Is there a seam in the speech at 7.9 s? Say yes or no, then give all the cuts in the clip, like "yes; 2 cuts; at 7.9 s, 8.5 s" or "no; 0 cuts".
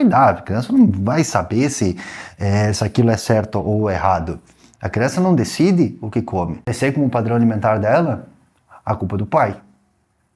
no; 1 cut; at 6.7 s